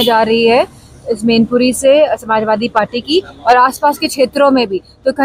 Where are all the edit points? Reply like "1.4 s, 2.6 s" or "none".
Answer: none